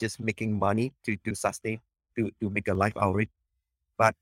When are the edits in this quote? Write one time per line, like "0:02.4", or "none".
0:01.3

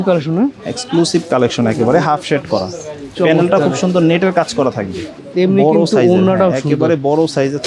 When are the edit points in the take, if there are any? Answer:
0:05.2

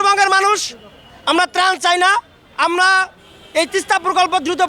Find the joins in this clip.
none

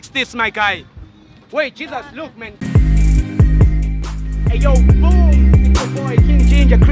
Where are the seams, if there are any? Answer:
0:02.5

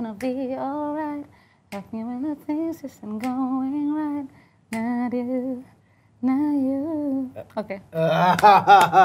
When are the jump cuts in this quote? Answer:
none

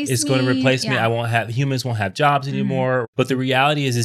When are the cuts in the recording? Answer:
0:03.0

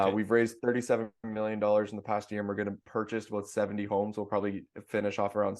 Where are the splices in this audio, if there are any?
0:02.8

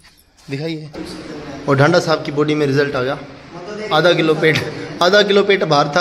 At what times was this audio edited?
0:01.0

